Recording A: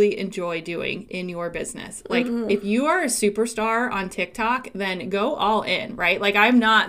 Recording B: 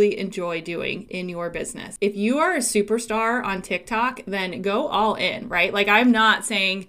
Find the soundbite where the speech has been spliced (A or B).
B